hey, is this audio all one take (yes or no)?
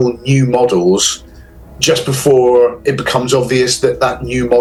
yes